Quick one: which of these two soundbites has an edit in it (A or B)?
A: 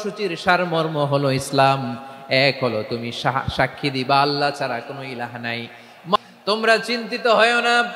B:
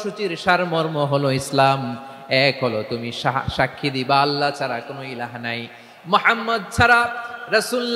A